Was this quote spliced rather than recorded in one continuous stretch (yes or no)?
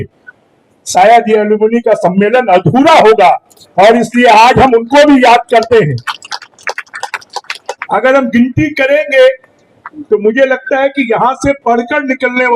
yes